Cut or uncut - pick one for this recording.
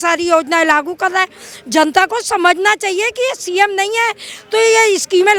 uncut